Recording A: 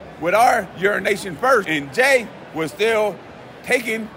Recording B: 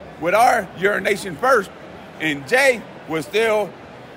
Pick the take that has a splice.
A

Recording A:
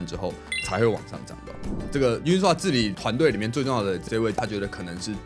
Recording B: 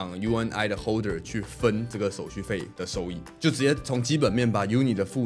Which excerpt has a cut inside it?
A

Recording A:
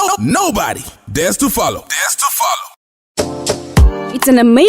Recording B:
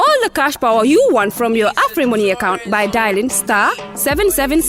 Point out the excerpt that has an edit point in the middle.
A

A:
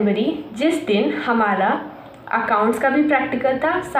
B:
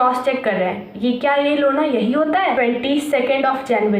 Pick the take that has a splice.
B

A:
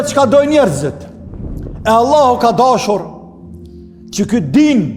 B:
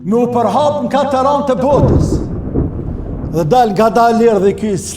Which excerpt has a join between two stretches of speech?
B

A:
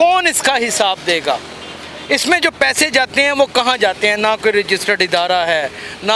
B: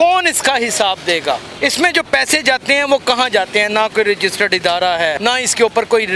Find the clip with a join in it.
B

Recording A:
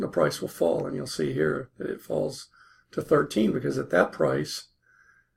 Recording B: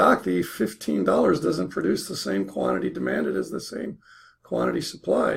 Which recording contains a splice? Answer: B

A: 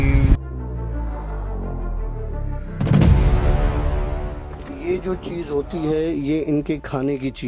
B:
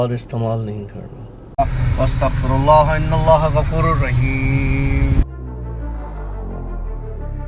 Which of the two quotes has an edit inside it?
B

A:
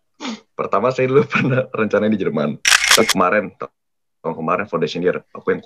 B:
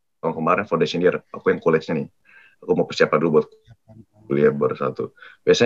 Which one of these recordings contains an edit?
A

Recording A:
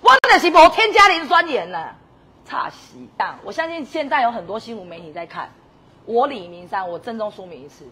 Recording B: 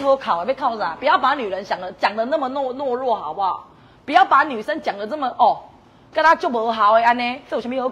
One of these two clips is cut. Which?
A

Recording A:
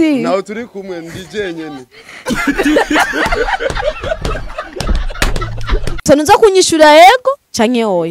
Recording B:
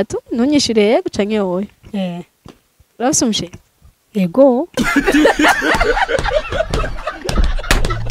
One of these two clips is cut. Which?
A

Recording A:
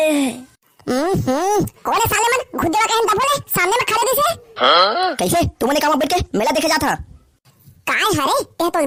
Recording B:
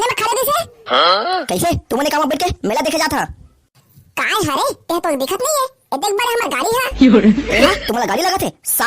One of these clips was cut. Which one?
B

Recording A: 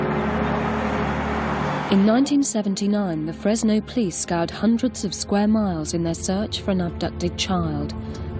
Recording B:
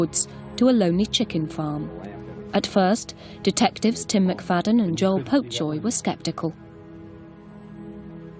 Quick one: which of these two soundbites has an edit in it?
B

